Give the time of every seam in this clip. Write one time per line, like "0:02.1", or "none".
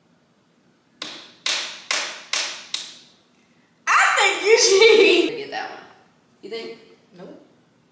0:05.3

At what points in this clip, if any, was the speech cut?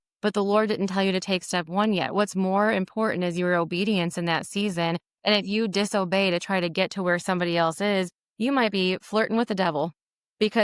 none

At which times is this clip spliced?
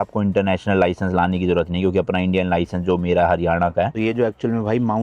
0:03.9

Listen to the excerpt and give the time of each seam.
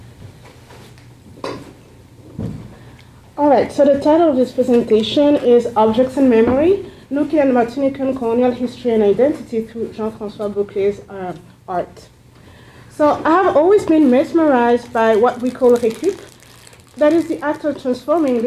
0:09.7

